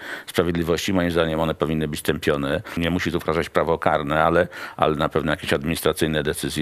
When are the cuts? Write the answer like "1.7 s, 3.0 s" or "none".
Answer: 2.7 s